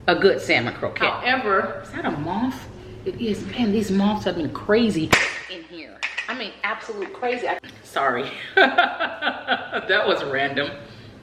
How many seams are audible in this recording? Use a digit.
2